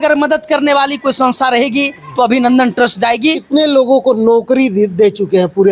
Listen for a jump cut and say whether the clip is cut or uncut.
cut